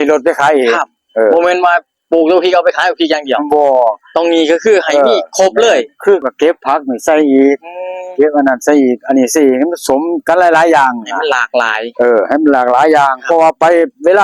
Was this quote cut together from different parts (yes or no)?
yes